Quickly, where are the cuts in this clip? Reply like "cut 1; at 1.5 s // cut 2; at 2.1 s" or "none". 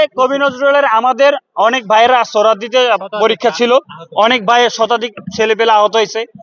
none